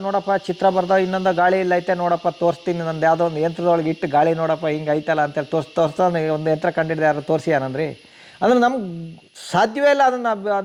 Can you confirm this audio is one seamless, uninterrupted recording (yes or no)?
yes